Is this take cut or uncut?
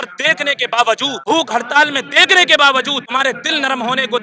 cut